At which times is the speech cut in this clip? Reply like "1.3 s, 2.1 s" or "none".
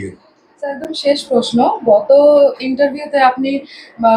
none

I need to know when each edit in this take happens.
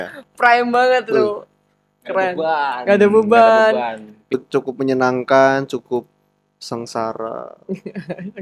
4.3 s

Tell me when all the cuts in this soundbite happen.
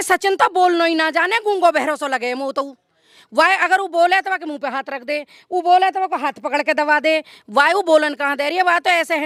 none

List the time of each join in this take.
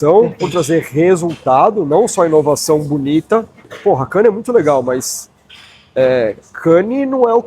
3.7 s

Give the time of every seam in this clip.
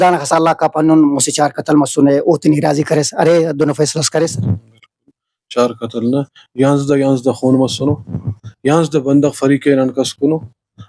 none

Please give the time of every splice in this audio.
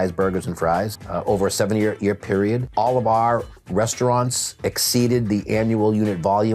1.0 s, 2.7 s

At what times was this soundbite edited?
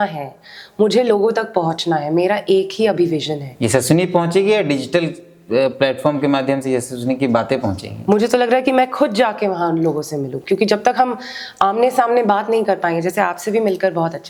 none

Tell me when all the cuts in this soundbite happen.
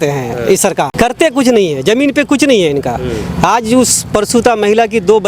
0.9 s

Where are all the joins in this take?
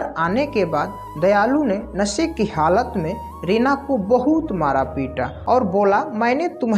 5.3 s

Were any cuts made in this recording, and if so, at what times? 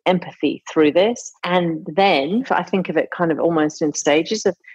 1.6 s, 2.5 s, 4.0 s

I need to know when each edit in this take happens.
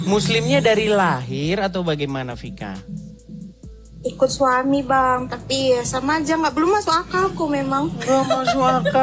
none

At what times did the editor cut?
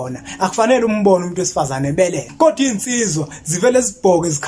2.2 s

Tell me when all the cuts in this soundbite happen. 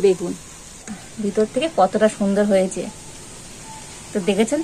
1.0 s

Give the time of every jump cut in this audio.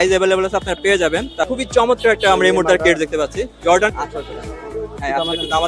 1.5 s, 3.9 s

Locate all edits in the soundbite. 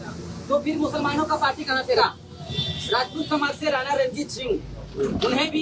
2.0 s

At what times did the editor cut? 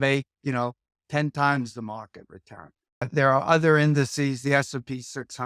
3.1 s

